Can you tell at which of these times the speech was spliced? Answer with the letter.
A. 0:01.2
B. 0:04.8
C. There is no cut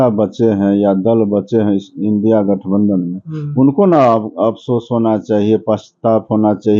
C